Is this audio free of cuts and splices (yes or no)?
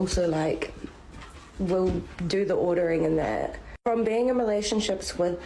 no